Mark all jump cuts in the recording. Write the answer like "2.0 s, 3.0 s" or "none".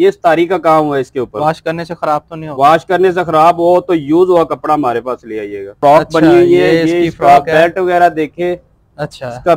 5.6 s